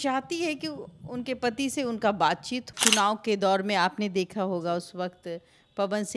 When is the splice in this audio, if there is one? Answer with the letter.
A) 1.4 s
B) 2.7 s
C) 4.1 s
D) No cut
B